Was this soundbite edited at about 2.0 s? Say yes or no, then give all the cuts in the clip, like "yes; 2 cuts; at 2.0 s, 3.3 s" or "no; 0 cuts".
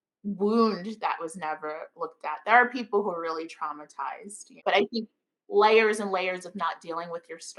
no; 1 cut; at 4.6 s